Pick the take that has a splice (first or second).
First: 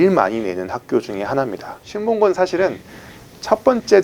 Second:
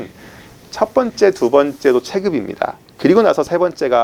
first